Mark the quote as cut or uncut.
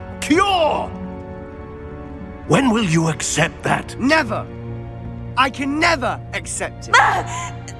uncut